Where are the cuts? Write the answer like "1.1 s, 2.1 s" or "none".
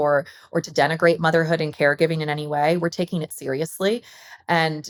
none